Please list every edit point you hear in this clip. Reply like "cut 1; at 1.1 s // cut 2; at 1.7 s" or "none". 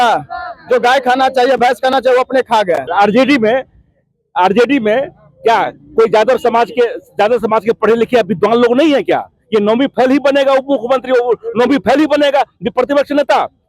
cut 1; at 2.9 s